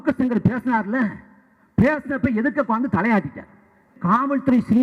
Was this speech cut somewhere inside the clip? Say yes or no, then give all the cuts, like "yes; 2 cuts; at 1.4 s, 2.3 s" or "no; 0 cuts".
yes; 1 cut; at 3.9 s